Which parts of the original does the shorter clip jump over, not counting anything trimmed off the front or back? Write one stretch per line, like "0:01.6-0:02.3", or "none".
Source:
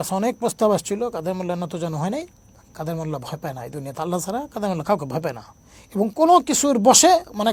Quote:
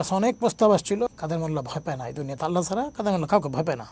0:01.1-0:02.7